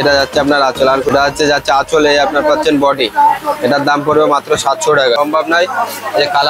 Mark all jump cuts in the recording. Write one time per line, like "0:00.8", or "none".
0:01.1
0:05.2